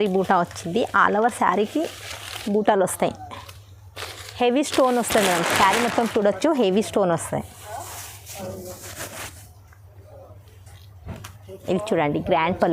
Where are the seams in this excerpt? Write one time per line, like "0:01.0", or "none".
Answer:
none

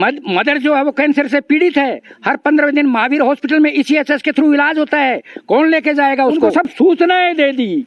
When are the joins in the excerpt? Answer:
0:06.5

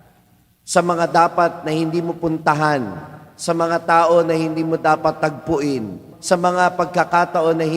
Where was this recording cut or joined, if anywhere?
0:06.1

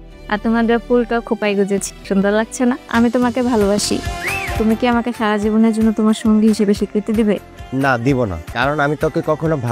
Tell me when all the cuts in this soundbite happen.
0:01.9
0:02.8
0:04.4

